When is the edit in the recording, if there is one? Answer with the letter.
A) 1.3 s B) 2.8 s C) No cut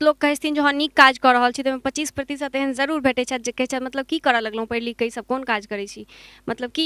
C